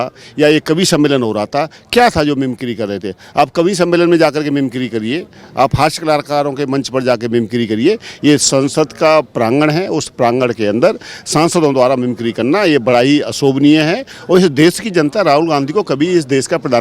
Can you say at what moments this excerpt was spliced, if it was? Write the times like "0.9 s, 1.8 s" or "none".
14.0 s